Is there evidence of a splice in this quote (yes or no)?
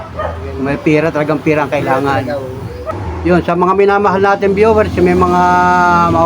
yes